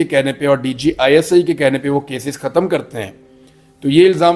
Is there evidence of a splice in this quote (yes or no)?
no